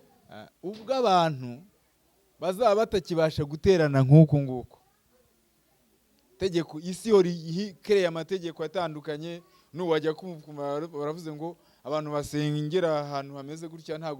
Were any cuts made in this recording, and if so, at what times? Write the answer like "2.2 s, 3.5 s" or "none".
none